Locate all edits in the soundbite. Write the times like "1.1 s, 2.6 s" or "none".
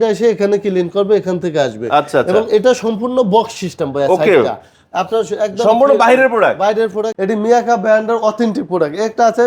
7.1 s